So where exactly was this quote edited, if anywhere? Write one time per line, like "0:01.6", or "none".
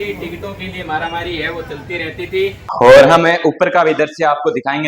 0:02.6